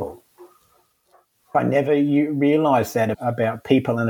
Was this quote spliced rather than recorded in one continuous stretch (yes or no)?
yes